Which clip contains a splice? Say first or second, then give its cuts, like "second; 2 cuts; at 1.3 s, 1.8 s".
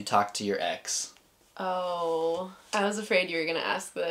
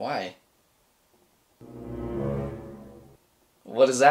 first; 1 cut; at 2.6 s